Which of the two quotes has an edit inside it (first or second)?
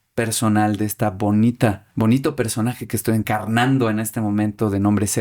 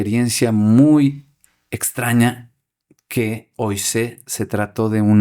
first